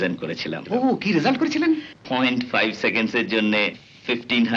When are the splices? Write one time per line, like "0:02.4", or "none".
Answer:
0:01.9